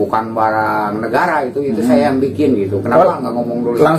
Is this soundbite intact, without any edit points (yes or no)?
yes